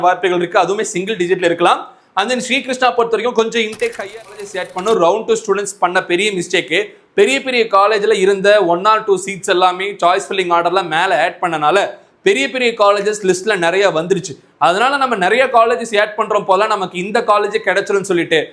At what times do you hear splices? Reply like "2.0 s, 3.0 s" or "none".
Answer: 4.4 s